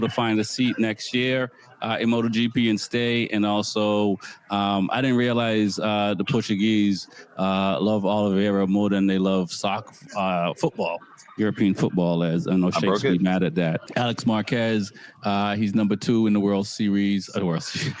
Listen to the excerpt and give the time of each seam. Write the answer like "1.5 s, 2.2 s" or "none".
13.8 s